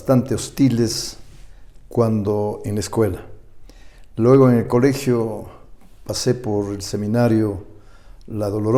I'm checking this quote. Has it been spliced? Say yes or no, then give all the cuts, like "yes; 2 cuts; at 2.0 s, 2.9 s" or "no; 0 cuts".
no; 0 cuts